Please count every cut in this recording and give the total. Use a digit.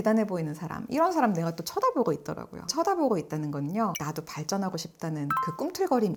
0